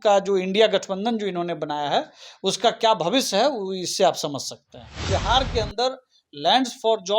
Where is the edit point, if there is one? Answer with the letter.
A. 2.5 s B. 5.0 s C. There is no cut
B